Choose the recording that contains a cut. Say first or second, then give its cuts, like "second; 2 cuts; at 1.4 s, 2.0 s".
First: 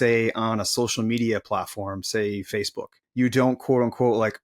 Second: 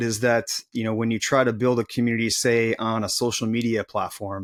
first; 1 cut; at 3.0 s